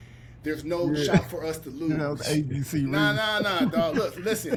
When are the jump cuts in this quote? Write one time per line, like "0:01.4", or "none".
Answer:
none